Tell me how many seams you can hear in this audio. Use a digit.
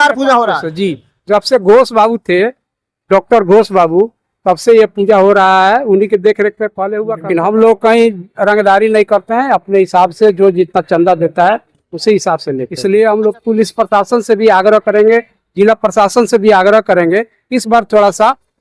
2